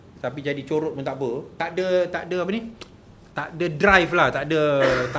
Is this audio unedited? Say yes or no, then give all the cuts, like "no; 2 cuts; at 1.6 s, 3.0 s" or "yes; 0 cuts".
no; 1 cut; at 1.5 s